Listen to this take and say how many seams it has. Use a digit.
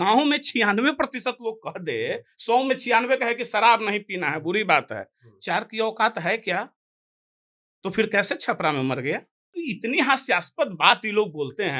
1